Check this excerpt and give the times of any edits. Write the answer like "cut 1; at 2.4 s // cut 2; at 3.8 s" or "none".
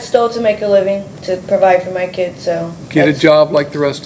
none